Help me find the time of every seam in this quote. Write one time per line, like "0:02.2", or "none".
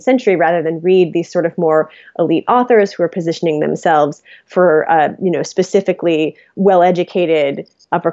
none